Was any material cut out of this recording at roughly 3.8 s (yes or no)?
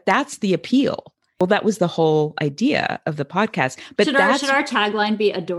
yes